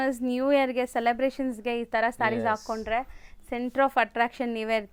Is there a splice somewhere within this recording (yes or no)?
no